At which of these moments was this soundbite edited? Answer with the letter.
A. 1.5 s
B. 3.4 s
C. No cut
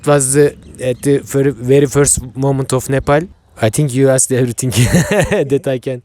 B